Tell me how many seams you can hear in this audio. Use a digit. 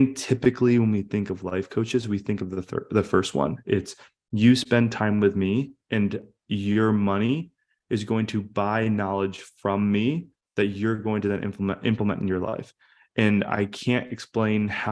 0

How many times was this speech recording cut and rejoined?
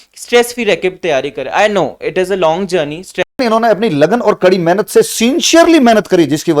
1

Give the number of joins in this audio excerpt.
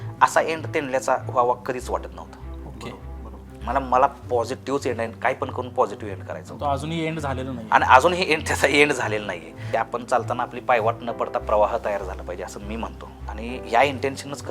2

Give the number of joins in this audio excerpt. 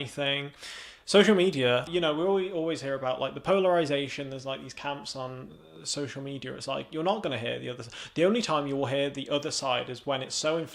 1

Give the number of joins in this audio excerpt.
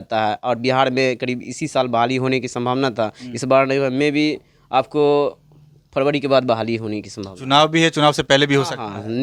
0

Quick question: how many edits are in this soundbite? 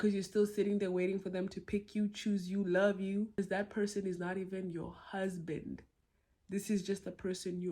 1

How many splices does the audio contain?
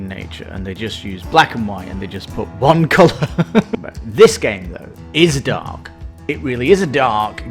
1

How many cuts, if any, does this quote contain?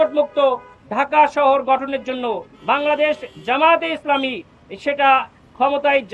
1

